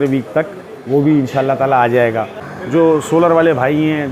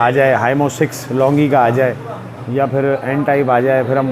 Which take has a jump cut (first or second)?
first